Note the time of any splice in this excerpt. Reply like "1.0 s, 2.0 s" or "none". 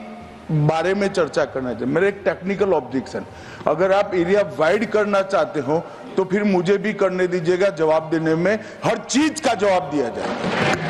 none